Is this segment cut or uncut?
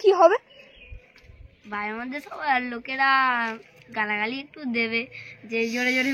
uncut